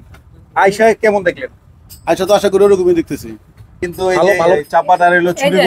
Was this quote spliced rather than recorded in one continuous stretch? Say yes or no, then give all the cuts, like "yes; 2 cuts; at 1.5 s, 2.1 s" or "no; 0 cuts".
yes; 1 cut; at 4.6 s